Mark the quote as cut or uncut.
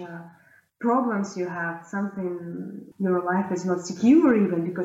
uncut